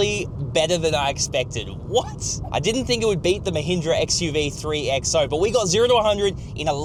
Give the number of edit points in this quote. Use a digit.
0